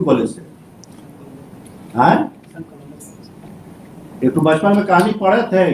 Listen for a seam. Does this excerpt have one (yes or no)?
no